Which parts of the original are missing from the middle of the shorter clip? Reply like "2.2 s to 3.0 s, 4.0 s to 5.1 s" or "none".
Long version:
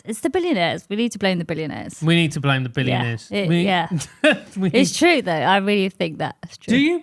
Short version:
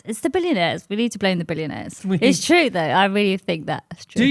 1.9 s to 4.5 s